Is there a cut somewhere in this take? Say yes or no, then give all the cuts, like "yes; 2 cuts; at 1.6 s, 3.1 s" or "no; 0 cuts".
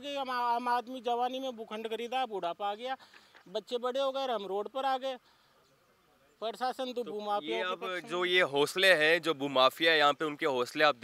no; 0 cuts